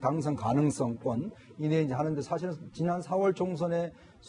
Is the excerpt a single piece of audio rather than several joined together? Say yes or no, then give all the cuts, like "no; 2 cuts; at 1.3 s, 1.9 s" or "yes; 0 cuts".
no; 1 cut; at 1.1 s